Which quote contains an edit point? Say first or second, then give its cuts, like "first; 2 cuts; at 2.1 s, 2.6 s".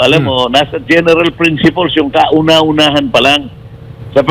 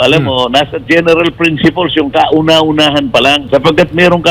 second; 1 cut; at 3.4 s